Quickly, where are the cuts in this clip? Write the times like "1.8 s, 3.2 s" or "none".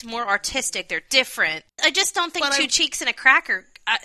1.8 s